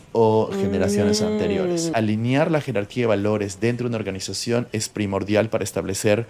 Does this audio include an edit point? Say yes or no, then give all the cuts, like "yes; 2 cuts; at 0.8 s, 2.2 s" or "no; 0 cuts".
yes; 1 cut; at 1.9 s